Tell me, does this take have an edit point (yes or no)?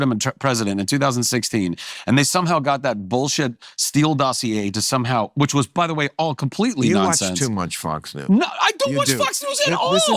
no